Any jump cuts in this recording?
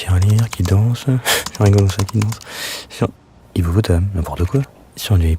yes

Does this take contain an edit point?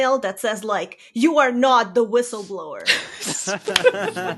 no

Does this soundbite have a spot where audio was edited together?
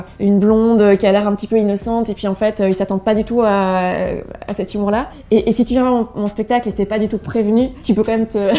no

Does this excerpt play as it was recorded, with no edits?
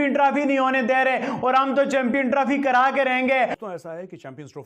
no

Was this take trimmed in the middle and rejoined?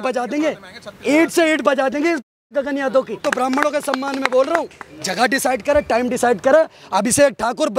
yes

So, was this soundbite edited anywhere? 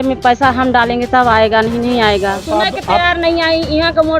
yes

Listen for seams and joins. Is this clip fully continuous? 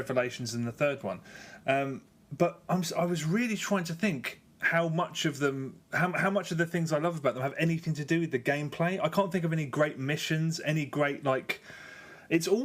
no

